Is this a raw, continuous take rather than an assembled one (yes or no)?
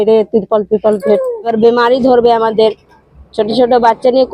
no